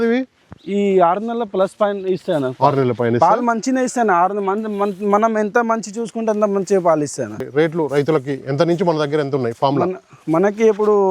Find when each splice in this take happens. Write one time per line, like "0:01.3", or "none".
0:07.4